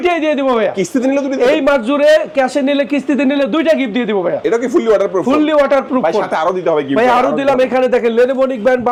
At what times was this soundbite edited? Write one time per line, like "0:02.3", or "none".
none